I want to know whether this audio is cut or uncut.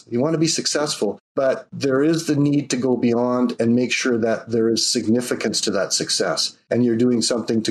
cut